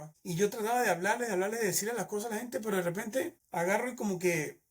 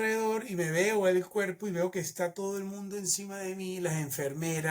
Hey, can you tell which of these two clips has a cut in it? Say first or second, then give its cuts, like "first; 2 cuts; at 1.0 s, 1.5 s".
first; 1 cut; at 3.4 s